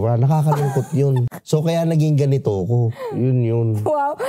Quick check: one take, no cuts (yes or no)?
no